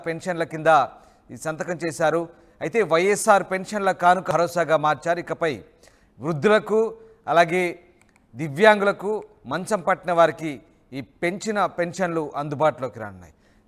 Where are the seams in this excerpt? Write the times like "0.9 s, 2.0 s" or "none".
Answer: 4.3 s